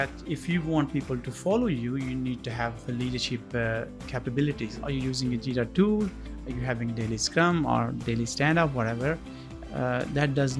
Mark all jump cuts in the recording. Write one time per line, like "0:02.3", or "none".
0:04.6